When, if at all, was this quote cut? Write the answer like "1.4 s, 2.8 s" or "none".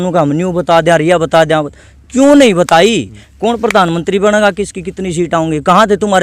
none

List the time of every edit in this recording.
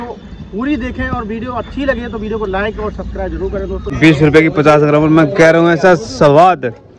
3.9 s

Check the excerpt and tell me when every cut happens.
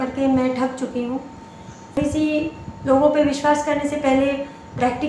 2.0 s

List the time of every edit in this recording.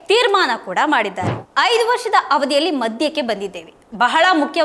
1.3 s

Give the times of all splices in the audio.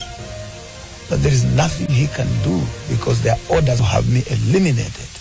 3.8 s

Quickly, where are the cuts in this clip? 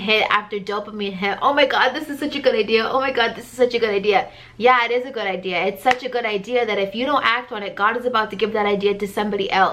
none

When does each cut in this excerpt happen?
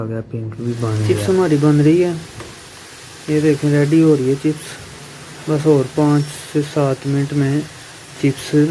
1.0 s

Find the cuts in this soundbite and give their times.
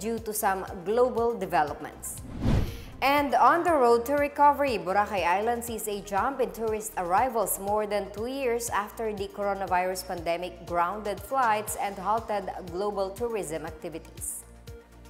14.2 s

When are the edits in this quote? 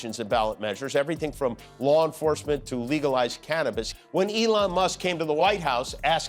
3.9 s

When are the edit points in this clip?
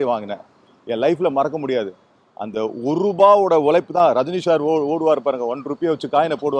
none

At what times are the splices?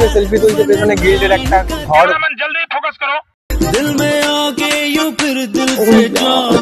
none

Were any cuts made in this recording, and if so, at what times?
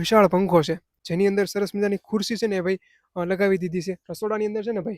0.9 s, 4.1 s

